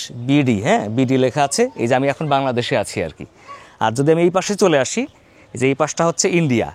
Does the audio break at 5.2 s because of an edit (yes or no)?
no